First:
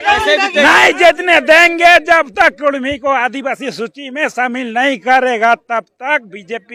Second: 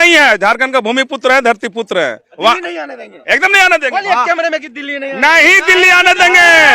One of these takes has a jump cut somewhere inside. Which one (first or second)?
second